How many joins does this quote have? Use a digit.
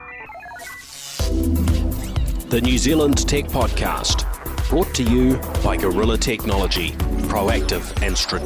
0